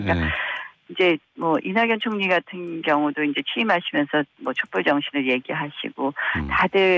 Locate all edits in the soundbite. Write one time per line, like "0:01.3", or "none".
0:03.7